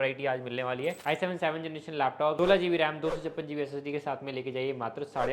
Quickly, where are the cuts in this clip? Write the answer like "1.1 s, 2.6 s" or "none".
1.0 s, 2.3 s